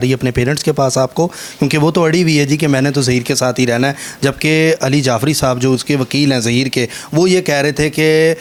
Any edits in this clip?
no; 0 cuts

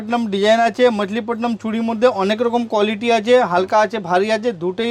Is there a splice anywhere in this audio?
no; 0 cuts

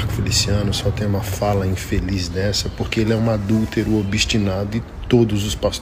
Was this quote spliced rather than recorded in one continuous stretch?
no; 0 cuts

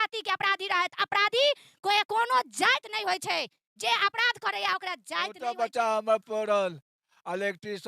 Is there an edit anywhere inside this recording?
yes; 1 cut; at 5.4 s

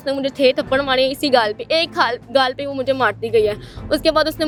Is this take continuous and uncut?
yes; 0 cuts

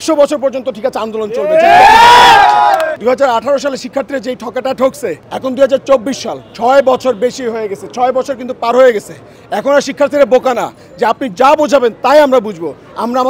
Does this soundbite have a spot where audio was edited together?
yes; 2 cuts; at 3.0 s, 5.3 s

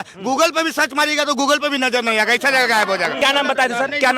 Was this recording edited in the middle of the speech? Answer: yes; 1 cut; at 3.2 s

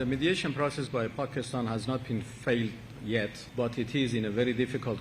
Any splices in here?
yes; 1 cut; at 3.4 s

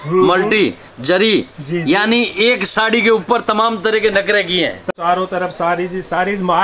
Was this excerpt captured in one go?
no; 1 cut; at 4.9 s

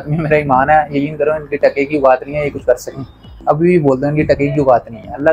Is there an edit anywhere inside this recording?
no; 0 cuts

